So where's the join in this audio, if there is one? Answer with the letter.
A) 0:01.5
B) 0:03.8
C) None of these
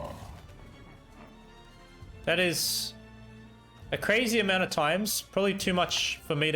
C